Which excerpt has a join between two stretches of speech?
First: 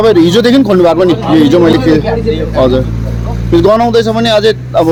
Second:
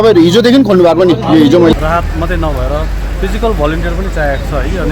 second; 1 cut; at 1.7 s

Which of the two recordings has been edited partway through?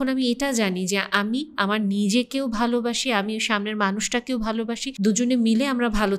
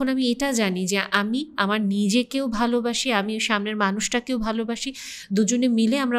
first; 1 cut; at 4.9 s

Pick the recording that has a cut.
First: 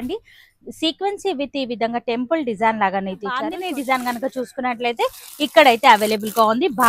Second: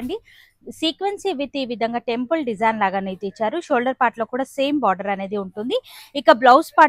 first; 1 cut; at 3.5 s

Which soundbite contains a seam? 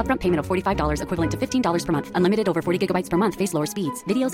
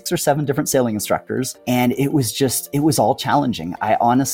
second; 1 cut; at 1.5 s

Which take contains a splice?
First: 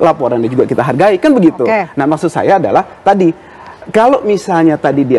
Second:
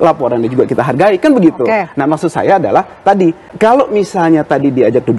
second; 1 cut; at 3.5 s

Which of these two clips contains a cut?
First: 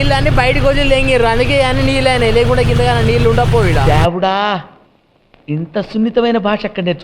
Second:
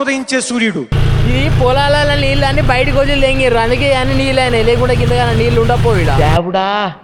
second; 1 cut; at 1.0 s

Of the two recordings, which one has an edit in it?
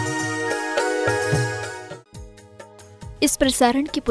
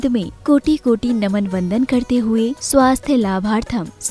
first; 1 cut; at 1.8 s

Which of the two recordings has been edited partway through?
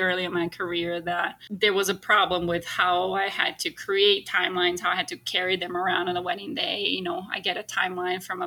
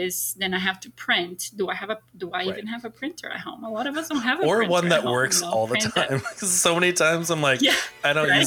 first; 1 cut; at 1.4 s

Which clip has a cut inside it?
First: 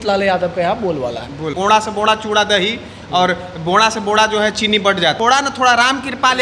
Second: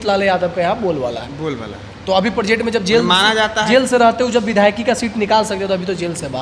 first; 2 cuts; at 1.5 s, 5.2 s

